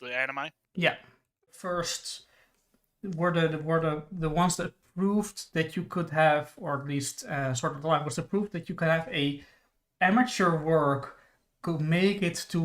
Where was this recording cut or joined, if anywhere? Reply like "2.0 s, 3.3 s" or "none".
1.6 s